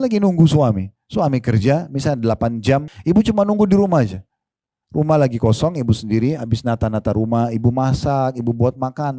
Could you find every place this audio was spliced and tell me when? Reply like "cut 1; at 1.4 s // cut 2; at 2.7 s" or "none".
cut 1; at 2.9 s